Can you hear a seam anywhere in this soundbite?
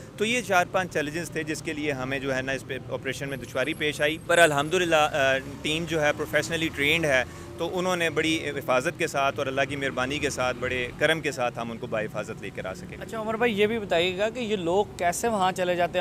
no; 0 cuts

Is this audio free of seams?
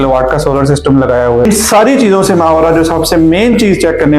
no; 1 cut; at 1.4 s

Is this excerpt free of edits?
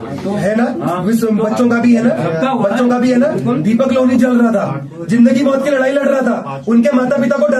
yes; 0 cuts

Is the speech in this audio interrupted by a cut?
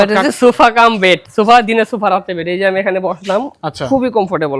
yes; 1 cut; at 1.3 s

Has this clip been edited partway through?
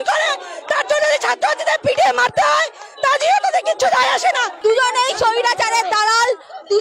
yes; 1 cut; at 4.5 s

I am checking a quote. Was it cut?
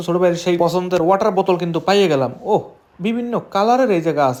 no; 0 cuts

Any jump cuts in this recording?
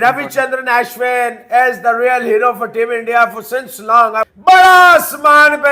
no; 0 cuts

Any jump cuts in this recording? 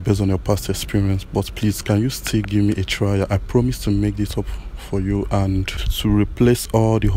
yes; 1 cut; at 5.8 s

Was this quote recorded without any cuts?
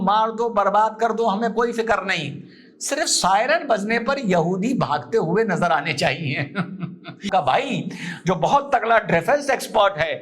no; 1 cut; at 7.2 s

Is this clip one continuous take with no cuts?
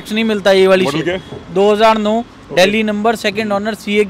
yes; 0 cuts

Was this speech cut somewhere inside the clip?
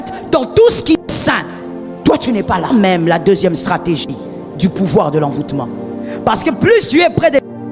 yes; 1 cut; at 2.7 s

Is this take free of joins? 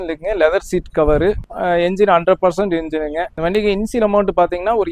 no; 2 cuts; at 1.5 s, 3.3 s

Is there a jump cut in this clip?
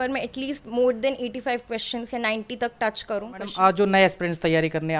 yes; 1 cut; at 3.5 s

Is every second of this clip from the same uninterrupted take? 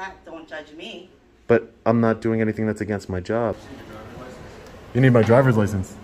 no; 1 cut; at 3.6 s

